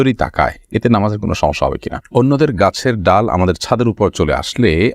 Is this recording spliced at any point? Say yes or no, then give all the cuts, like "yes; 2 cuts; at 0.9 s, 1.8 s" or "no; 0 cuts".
yes; 1 cut; at 2.0 s